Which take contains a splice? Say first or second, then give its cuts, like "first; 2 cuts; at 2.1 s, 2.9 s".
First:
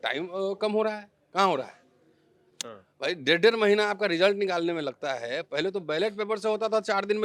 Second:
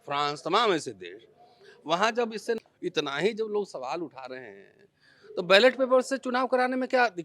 second; 1 cut; at 2.6 s